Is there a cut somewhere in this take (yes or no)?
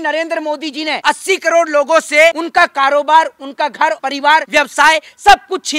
yes